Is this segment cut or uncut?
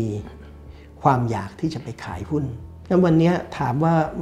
cut